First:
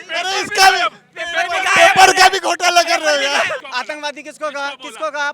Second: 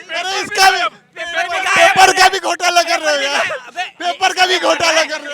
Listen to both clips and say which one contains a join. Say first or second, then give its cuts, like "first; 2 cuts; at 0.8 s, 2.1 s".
first; 1 cut; at 3.6 s